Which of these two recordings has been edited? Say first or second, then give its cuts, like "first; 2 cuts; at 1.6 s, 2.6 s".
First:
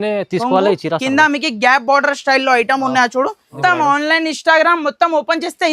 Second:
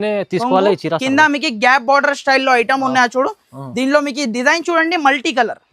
first; 1 cut; at 3.5 s